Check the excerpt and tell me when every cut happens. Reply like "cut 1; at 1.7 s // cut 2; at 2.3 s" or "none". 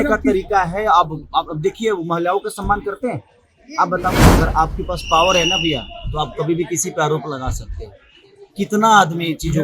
cut 1; at 4.2 s